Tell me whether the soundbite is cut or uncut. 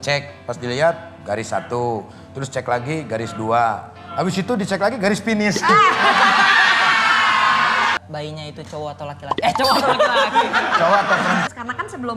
cut